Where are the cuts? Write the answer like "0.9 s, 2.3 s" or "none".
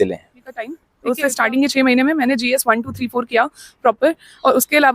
0.9 s

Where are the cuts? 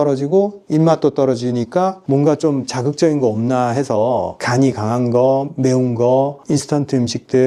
none

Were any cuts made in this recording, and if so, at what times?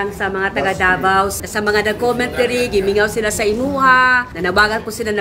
1.3 s, 4.3 s

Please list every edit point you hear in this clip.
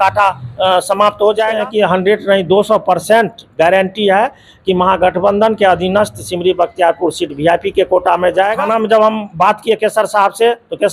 1.5 s, 8.5 s

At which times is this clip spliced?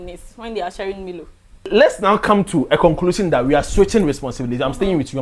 1.7 s

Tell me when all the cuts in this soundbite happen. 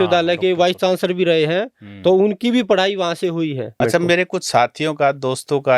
3.8 s

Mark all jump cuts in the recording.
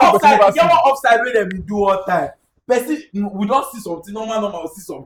none

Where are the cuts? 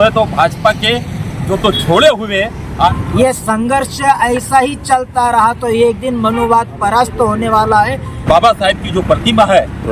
2.9 s, 8.2 s

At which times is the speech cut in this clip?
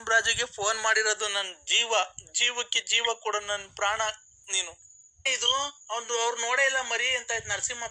5.2 s

